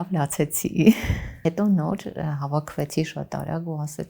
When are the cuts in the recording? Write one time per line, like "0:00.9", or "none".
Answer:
0:01.3